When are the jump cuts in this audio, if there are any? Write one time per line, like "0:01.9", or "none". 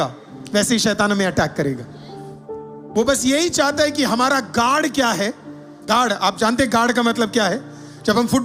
none